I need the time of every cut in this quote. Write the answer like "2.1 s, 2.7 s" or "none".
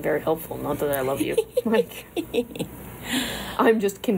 none